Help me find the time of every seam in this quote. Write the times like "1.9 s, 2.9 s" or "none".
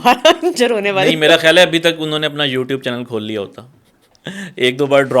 none